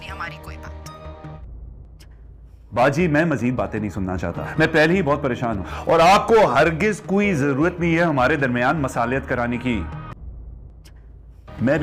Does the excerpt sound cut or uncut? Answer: uncut